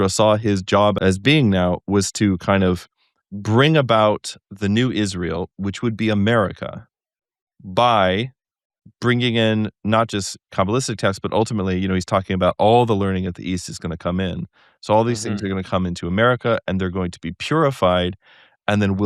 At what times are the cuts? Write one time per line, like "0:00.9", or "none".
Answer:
0:01.0